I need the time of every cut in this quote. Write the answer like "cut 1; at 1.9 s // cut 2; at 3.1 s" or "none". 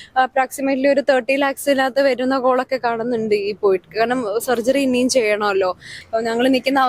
cut 1; at 5.9 s